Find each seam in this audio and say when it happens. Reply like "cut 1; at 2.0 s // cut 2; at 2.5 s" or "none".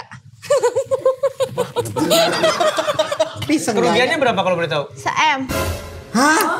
cut 1; at 3.5 s